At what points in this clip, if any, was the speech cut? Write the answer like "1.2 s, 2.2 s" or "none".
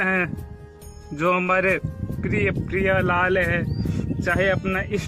none